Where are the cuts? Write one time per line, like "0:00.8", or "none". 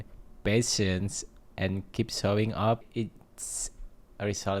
0:02.8